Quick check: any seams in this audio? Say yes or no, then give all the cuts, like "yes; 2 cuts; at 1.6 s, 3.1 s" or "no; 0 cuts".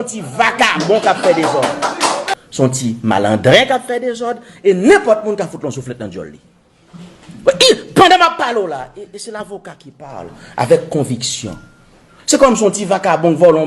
yes; 1 cut; at 2.2 s